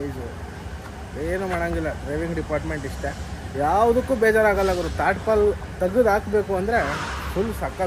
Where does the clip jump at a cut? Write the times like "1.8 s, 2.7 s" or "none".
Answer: none